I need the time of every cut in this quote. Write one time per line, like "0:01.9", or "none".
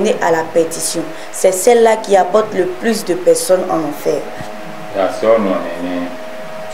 none

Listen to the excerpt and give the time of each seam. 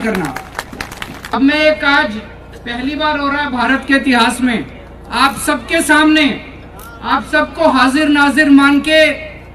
0:01.2

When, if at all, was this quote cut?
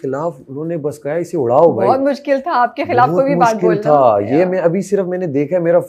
none

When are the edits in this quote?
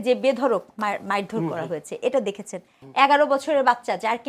0:02.7

